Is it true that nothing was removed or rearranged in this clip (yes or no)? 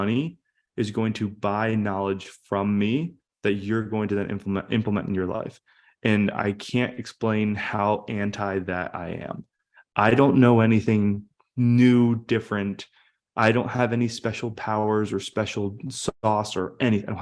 yes